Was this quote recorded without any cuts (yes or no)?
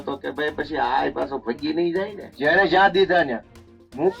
no